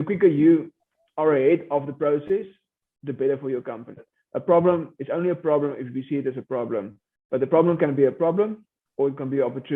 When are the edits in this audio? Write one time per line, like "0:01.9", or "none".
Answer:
0:04.1